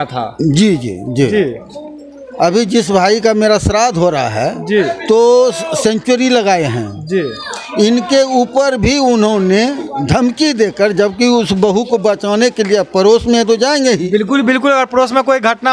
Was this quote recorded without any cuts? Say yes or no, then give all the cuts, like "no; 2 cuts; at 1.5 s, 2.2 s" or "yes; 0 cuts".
yes; 0 cuts